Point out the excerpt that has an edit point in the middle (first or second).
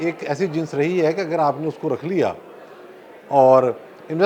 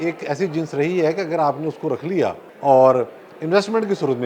second